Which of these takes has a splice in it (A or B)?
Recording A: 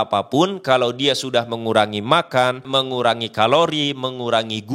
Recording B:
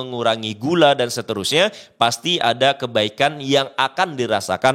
A